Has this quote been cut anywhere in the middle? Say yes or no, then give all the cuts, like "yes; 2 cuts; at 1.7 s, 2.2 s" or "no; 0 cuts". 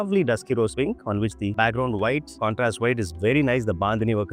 no; 0 cuts